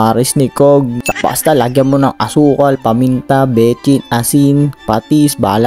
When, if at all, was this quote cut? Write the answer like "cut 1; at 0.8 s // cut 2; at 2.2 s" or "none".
cut 1; at 1.1 s